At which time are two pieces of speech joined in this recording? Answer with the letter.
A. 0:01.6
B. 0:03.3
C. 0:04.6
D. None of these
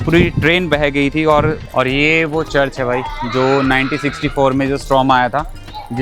A